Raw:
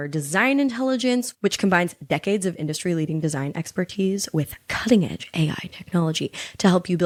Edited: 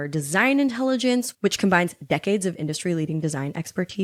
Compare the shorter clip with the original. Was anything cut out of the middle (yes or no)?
no